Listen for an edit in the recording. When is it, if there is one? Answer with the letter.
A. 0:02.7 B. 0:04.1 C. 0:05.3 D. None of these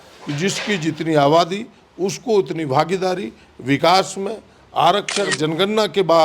C